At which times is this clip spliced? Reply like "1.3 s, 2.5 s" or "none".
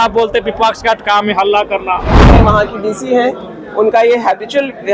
2.2 s